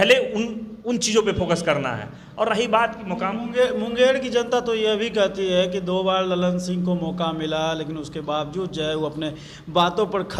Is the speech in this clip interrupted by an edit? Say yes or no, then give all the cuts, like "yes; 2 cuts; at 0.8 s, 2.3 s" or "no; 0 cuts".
no; 0 cuts